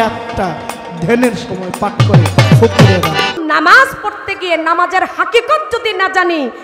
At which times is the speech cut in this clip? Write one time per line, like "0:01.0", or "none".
0:03.4